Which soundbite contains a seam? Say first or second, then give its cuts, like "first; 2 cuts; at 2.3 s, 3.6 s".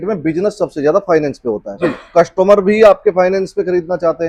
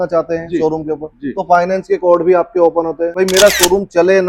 second; 1 cut; at 3.1 s